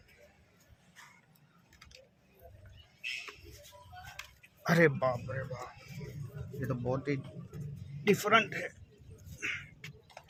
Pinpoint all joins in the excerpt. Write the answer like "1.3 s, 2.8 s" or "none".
none